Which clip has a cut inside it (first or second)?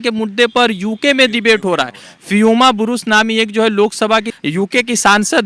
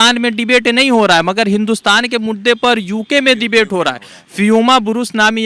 first